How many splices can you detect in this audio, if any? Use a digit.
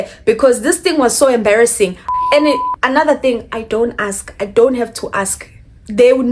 1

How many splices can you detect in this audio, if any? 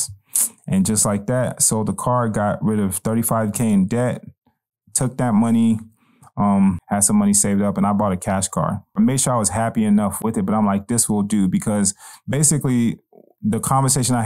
2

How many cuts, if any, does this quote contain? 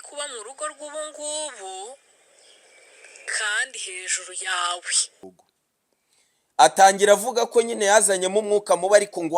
1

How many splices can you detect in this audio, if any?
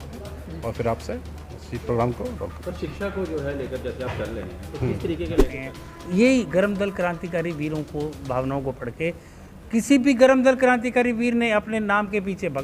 1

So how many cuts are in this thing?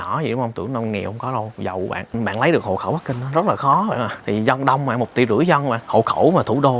3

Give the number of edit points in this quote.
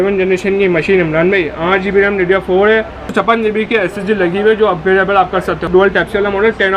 2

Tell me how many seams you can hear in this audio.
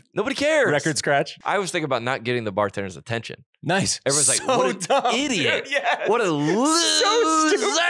1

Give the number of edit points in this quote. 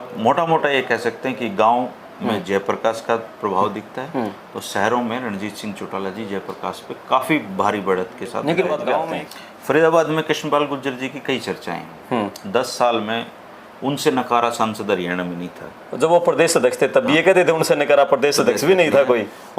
1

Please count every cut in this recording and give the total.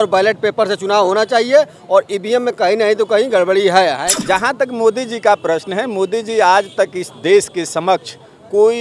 1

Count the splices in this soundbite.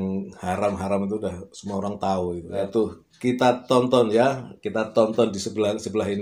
1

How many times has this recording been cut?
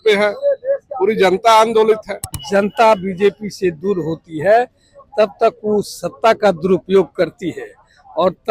1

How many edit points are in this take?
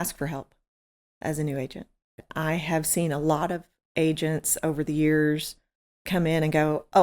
1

